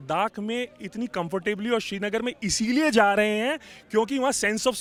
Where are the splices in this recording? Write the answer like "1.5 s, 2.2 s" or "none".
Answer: none